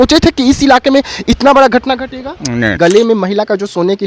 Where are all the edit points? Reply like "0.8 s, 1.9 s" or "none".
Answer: 2.8 s